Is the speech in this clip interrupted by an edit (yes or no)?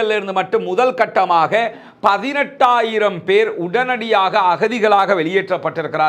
no